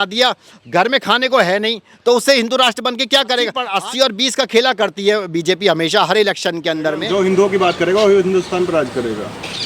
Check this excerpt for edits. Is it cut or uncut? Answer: cut